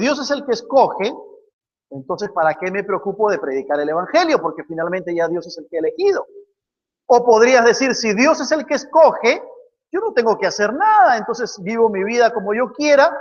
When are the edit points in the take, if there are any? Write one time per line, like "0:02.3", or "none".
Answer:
none